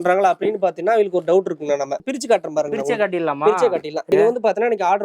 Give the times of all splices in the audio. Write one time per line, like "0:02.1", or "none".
0:02.1
0:04.1